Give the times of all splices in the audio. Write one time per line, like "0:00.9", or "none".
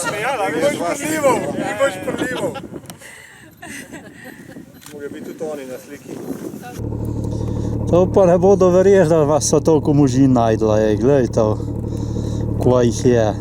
0:06.7

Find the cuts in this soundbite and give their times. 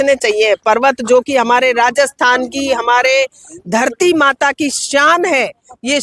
none

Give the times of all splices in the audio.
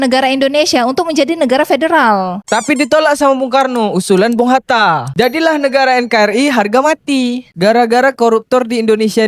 0:07.5

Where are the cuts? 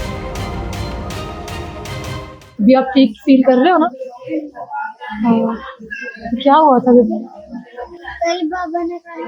none

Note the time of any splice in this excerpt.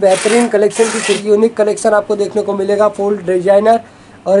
0:01.2

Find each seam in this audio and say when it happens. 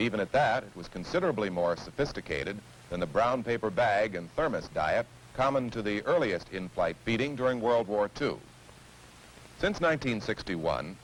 none

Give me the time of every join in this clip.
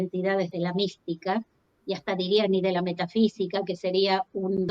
none

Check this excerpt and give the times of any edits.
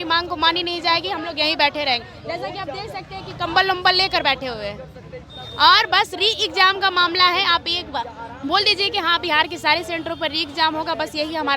none

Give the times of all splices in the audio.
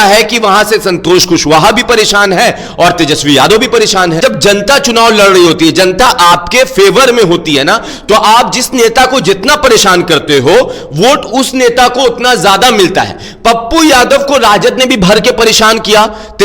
0:04.2

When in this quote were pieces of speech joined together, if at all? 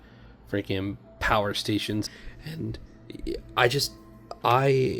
0:02.1

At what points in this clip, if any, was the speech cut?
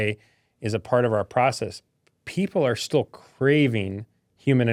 none

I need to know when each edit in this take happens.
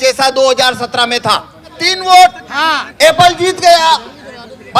0:01.9

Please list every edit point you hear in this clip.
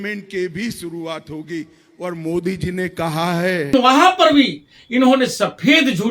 0:03.7

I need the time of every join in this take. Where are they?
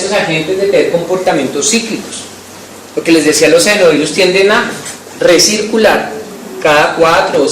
0:05.7

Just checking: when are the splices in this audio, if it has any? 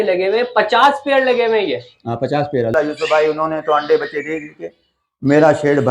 0:02.7

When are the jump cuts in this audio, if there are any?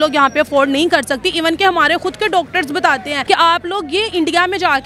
0:03.1

